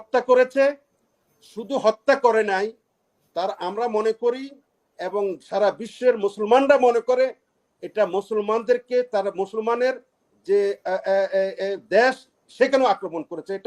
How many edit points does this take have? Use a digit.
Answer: 0